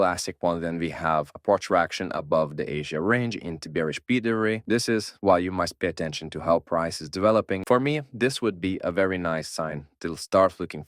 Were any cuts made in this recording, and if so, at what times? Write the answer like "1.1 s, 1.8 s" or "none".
4.6 s, 7.6 s